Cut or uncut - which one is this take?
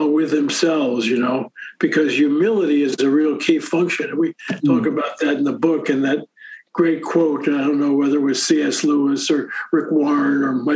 uncut